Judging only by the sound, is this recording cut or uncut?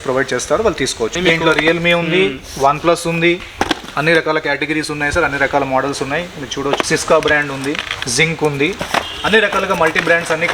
cut